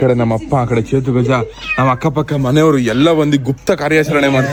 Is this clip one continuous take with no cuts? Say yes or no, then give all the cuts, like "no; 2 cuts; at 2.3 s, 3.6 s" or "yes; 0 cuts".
yes; 0 cuts